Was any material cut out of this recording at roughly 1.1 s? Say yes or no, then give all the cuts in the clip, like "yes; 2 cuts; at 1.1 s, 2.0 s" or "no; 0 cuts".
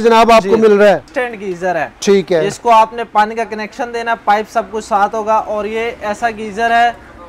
yes; 1 cut; at 1.1 s